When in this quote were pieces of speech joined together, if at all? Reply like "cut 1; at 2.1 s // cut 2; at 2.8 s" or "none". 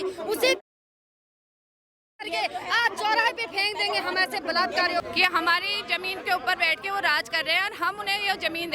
cut 1; at 5.1 s